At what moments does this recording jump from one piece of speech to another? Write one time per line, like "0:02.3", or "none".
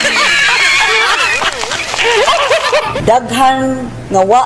0:02.9